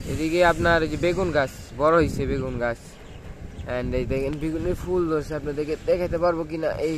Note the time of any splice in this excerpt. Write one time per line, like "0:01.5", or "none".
none